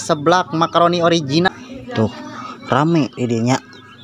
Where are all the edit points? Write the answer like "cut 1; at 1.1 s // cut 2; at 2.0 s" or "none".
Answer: cut 1; at 1.5 s